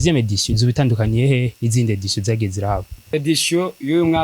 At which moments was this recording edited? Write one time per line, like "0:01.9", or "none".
0:03.1